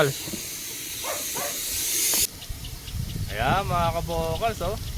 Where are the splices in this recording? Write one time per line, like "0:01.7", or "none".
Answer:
0:02.2